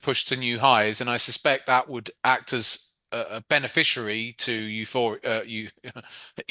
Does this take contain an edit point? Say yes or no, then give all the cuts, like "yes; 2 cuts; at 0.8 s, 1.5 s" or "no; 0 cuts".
no; 0 cuts